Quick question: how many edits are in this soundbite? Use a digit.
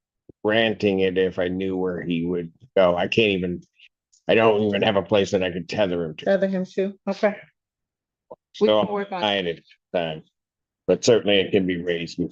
0